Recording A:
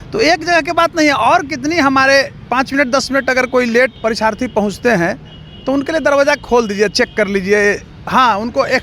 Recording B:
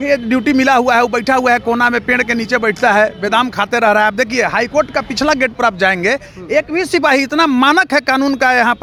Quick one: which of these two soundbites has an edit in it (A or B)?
A